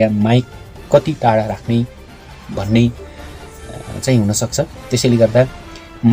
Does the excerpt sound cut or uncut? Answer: uncut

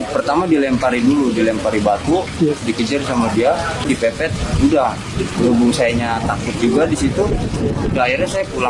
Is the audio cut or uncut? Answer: cut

